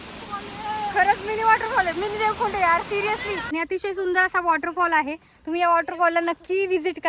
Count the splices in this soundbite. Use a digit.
1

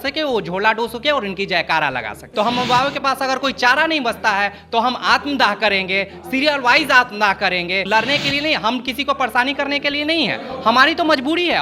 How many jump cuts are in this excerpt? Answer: 2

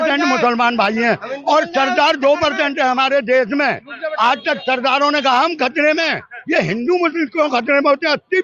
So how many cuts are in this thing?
0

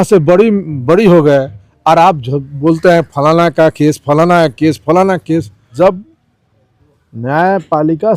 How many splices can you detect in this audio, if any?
1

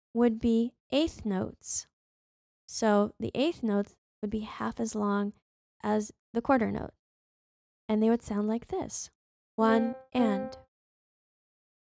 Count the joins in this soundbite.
0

